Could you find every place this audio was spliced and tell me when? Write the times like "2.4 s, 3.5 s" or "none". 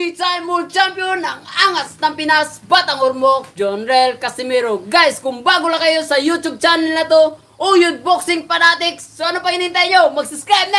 none